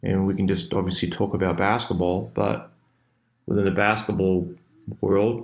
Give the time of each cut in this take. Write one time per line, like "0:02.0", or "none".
none